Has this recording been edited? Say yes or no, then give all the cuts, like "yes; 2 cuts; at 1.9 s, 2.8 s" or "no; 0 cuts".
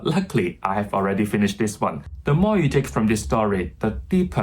yes; 1 cut; at 2.1 s